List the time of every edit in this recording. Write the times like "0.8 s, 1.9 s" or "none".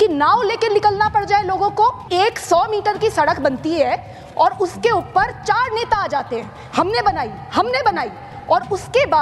2.1 s